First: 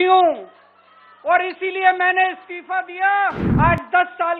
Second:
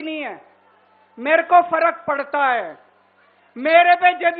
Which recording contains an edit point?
first; 1 cut; at 3.4 s

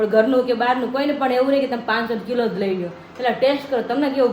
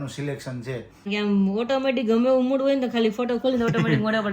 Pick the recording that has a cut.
second; 1 cut; at 1.1 s

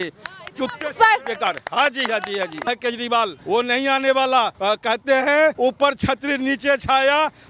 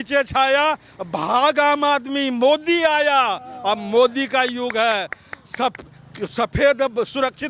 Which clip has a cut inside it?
first; 4 cuts; at 2.6 s, 3.4 s, 4.5 s, 5.6 s

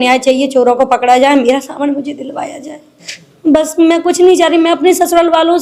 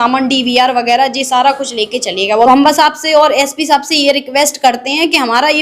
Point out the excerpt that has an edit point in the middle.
second; 1 cut; at 2.5 s

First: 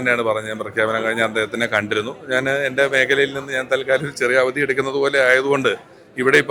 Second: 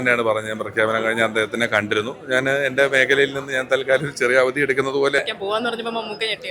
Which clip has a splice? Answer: second; 1 cut; at 5.2 s

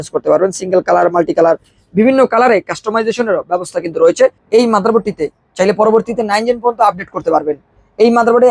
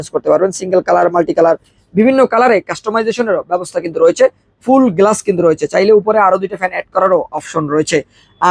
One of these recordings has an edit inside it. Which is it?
first; 1 cut; at 4.4 s

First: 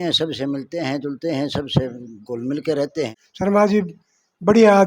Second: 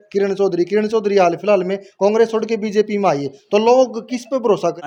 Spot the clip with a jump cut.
first; 1 cut; at 3.2 s

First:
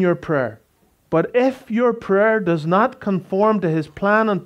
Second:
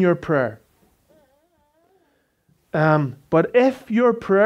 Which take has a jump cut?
first; 1 cut; at 1.0 s

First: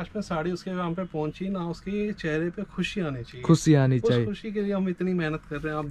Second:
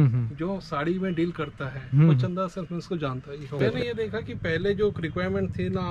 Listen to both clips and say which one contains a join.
second; 1 cut; at 3.6 s

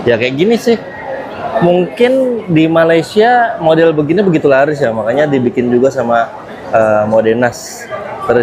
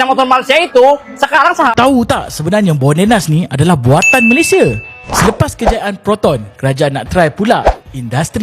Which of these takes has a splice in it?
second; 1 cut; at 1.7 s

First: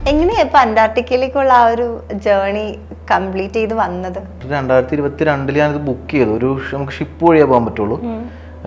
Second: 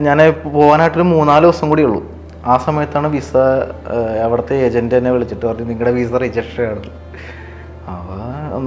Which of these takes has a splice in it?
first; 1 cut; at 4.4 s

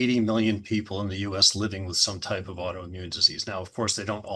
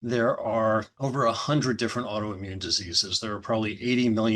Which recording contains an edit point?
second; 1 cut; at 0.9 s

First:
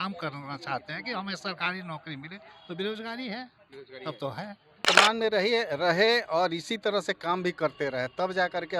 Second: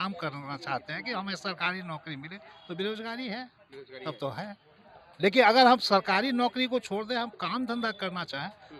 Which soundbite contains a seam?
first; 1 cut; at 4.8 s

